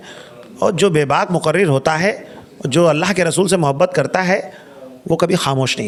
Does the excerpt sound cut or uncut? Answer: uncut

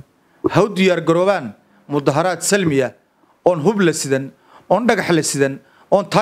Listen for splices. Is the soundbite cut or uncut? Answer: uncut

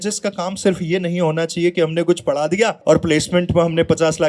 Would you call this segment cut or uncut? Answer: cut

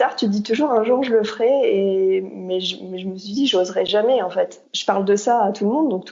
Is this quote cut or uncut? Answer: cut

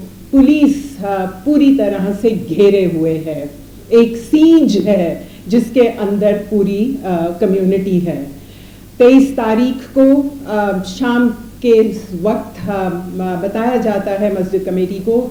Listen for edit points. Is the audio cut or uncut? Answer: uncut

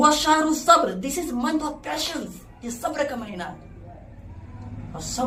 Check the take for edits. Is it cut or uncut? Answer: uncut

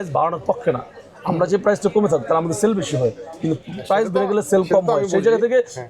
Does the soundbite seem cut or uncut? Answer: uncut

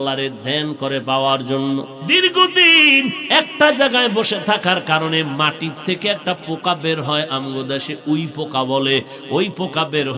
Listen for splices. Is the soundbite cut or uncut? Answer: cut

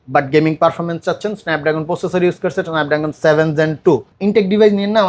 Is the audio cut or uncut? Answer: cut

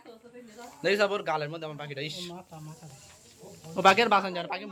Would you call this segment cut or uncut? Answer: uncut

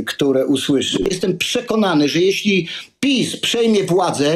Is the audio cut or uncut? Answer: cut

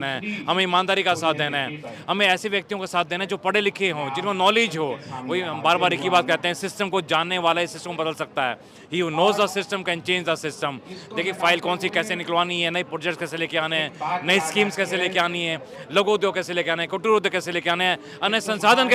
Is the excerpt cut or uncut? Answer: uncut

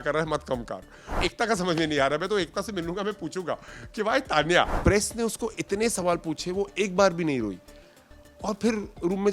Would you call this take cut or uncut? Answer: cut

